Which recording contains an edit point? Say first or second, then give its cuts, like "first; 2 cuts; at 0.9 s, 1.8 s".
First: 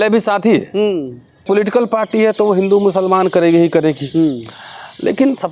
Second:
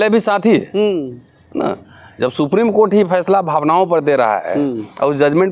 first; 1 cut; at 1.4 s